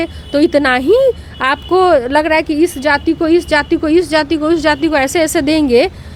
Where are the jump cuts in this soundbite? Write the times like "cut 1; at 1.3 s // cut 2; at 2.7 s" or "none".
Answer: none